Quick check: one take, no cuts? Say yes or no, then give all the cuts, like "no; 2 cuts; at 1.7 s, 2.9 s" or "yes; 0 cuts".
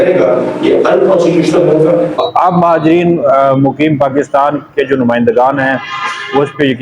no; 1 cut; at 2.2 s